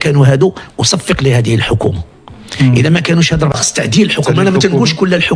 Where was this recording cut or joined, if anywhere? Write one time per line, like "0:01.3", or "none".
0:03.5